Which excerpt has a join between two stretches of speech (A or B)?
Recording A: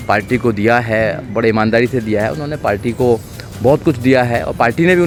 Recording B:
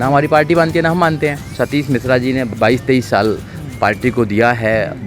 B